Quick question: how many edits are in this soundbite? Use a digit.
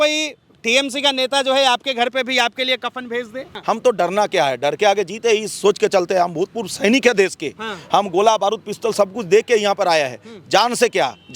1